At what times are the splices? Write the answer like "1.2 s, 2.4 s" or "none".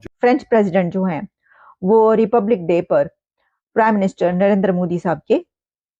none